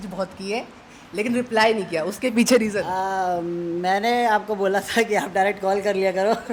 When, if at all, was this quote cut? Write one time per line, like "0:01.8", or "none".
none